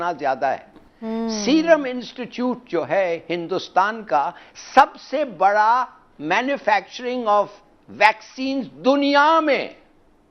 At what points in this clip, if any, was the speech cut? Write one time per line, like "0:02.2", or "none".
0:01.0

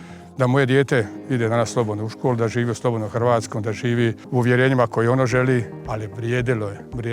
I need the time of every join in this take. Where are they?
0:04.2
0:05.8

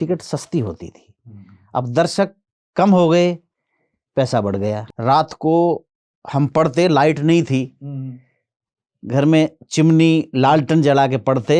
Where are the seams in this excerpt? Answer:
0:04.9

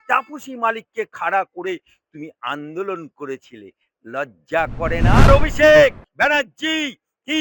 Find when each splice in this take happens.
0:05.3

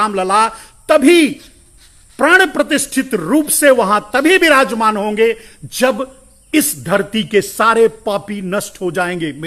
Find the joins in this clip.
none

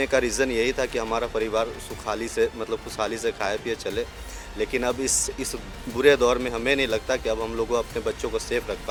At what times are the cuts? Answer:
none

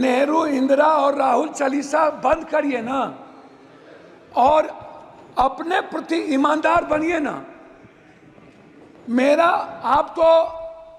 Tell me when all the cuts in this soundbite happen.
none

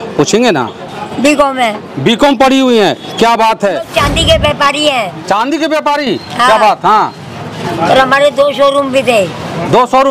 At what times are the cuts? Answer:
0:03.9

